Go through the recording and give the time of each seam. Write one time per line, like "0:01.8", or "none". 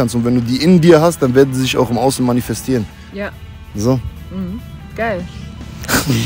none